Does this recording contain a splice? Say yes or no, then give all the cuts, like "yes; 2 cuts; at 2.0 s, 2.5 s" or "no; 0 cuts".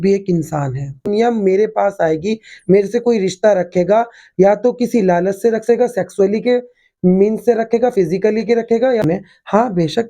yes; 2 cuts; at 1.1 s, 9.0 s